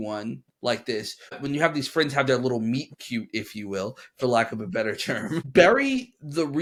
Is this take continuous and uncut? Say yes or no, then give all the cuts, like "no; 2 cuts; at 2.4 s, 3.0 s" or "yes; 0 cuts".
yes; 0 cuts